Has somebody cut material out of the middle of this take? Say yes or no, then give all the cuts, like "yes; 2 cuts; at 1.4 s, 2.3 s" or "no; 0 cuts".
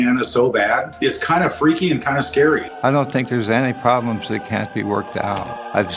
yes; 1 cut; at 2.6 s